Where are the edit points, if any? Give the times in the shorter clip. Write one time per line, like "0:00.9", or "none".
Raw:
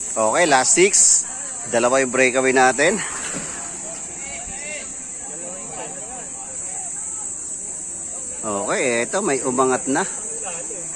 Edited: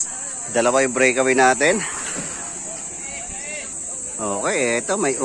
0:03.7